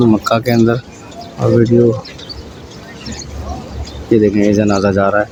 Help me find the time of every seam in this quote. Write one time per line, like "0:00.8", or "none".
none